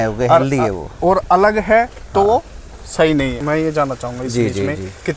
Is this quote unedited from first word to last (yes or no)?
no